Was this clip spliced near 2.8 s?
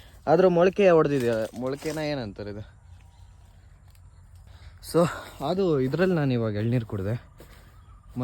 no; 1 cut; at 4.5 s

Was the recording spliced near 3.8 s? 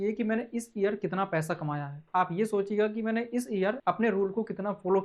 yes; 1 cut; at 3.8 s

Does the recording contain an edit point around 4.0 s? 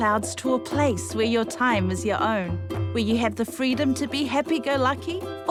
no; 0 cuts

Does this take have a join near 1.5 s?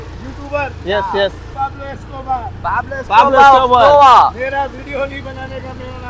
yes; 1 cut; at 1.5 s

